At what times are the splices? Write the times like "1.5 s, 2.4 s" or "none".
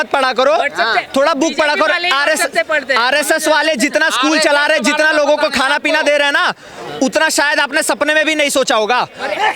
none